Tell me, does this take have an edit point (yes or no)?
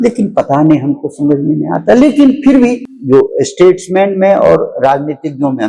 yes